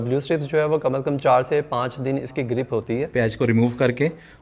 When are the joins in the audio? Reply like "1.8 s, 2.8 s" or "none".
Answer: 3.1 s